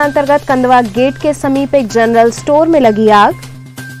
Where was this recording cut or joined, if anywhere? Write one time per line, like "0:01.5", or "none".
none